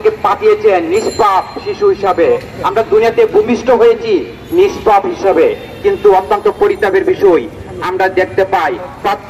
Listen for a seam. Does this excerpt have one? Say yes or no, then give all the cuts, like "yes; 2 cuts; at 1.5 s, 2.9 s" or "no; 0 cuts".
no; 0 cuts